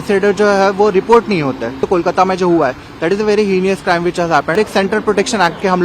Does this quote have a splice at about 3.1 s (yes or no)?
no